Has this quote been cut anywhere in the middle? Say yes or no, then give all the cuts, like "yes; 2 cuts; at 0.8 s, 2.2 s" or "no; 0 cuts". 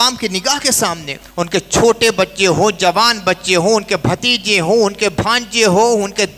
yes; 1 cut; at 1.2 s